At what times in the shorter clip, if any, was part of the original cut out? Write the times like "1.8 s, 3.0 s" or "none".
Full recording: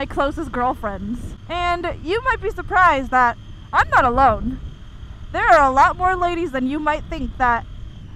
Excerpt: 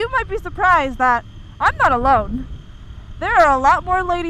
none